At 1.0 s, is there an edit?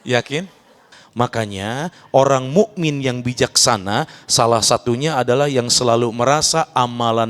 yes; 1 cut; at 1.0 s

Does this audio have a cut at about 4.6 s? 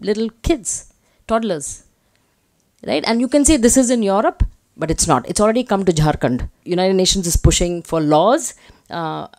no; 1 cut; at 6.6 s

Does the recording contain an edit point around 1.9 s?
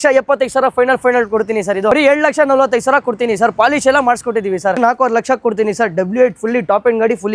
yes; 2 cuts; at 1.9 s, 4.8 s

